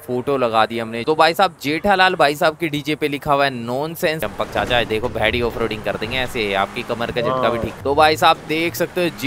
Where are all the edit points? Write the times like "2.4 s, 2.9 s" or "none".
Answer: 0.9 s, 4.2 s, 7.7 s